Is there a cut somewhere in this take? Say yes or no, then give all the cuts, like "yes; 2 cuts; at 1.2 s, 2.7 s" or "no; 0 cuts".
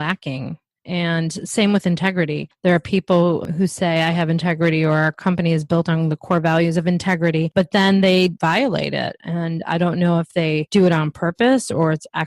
yes; 3 cuts; at 2.4 s, 7.5 s, 10.7 s